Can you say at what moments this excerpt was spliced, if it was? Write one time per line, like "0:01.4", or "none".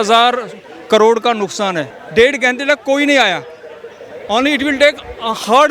0:02.0